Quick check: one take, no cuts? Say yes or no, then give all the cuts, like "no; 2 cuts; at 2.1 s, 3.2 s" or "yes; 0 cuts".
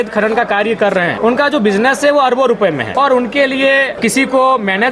no; 3 cuts; at 1.1 s, 2.9 s, 3.9 s